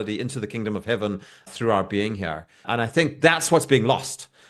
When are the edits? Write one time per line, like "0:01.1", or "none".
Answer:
0:01.5
0:02.6